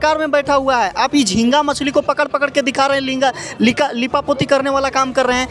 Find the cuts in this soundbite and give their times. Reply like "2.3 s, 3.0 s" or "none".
none